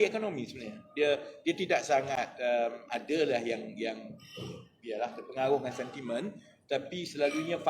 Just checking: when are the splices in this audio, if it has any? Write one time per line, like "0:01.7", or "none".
none